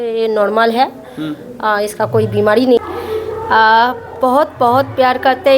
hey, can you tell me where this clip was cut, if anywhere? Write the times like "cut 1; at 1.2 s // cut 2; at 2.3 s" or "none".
cut 1; at 2.8 s